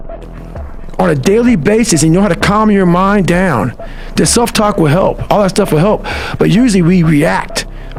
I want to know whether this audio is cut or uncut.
uncut